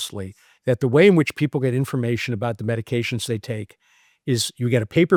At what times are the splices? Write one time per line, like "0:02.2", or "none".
none